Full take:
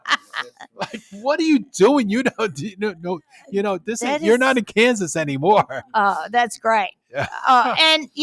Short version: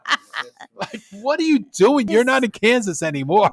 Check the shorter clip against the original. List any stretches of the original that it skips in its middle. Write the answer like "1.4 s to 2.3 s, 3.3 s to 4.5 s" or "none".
2.1 s to 4.2 s

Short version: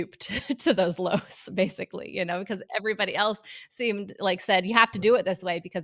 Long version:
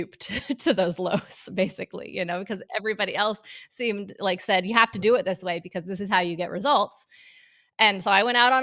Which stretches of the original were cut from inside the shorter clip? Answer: none

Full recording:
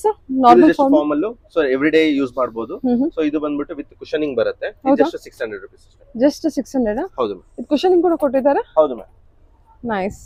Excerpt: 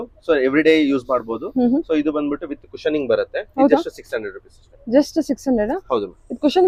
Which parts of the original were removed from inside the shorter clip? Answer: none

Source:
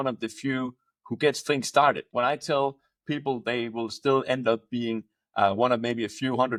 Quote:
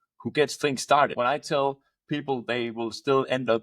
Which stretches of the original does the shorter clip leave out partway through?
2.0 s to 2.1 s

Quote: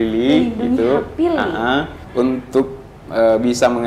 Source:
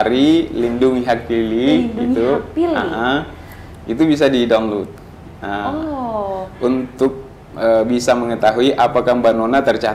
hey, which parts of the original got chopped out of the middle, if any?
3.4 s to 6.5 s

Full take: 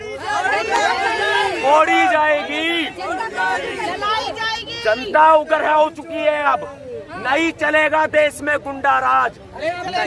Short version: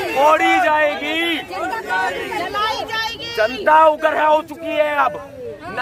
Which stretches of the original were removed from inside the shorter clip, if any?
none

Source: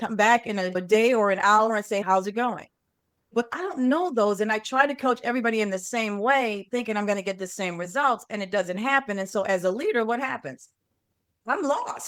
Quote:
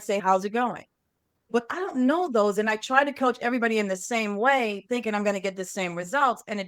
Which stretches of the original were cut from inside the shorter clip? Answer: none

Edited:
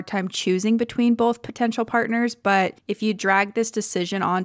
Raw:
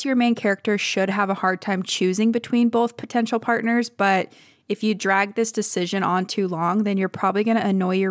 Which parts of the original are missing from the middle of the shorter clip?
4.4 s to 4.6 s

